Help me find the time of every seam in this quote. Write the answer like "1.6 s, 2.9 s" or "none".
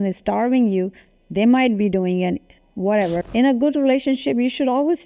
3.2 s